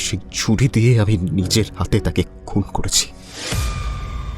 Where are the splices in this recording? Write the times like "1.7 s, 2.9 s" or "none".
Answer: 3.1 s